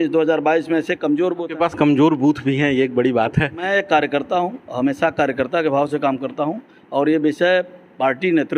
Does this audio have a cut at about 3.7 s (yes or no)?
yes